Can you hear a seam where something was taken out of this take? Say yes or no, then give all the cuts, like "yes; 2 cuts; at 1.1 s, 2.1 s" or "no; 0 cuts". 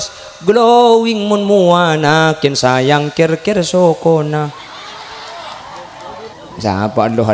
yes; 1 cut; at 6.4 s